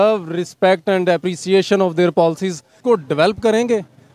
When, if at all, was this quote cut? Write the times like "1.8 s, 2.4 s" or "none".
2.7 s